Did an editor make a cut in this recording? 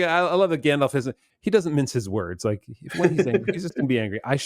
yes; 1 cut; at 1.2 s

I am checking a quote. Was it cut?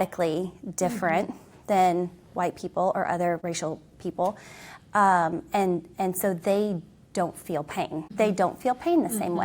yes; 2 cuts; at 3.4 s, 8.1 s

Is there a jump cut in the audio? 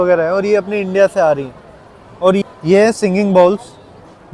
yes; 1 cut; at 2.4 s

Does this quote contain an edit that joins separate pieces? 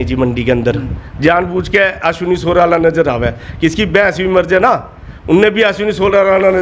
no; 0 cuts

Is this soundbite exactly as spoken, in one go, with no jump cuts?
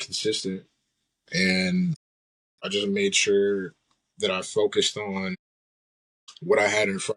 yes; 0 cuts

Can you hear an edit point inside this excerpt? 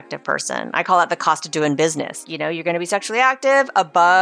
yes; 1 cut; at 2.3 s

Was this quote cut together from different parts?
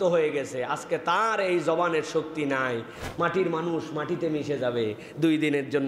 yes; 1 cut; at 2.9 s

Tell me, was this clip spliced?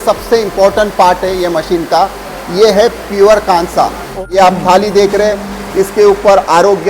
yes; 1 cut; at 4.2 s

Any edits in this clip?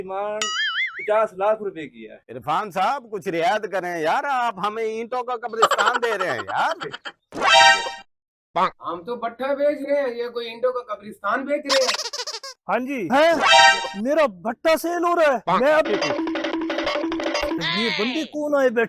yes; 3 cuts; at 12.6 s, 15.9 s, 17.7 s

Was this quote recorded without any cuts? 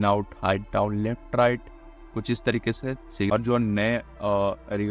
no; 1 cut; at 3.3 s

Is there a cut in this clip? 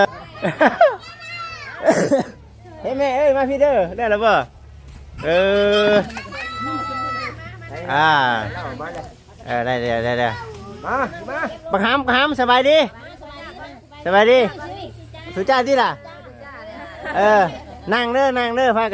no; 0 cuts

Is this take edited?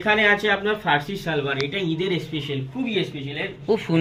no; 0 cuts

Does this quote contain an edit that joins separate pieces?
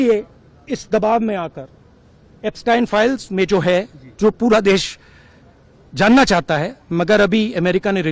no; 0 cuts

